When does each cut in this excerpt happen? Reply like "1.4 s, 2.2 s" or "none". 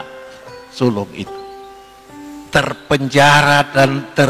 1.3 s, 2.5 s